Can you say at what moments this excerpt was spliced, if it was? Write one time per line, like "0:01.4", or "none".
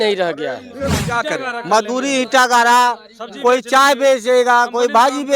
0:01.0